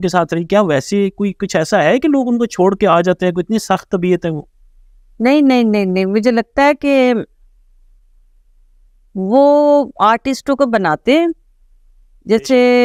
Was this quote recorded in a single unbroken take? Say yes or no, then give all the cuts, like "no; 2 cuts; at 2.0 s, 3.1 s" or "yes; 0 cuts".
yes; 0 cuts